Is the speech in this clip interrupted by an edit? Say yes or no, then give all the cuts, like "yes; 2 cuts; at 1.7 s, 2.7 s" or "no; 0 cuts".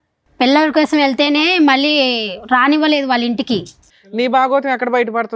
yes; 1 cut; at 3.8 s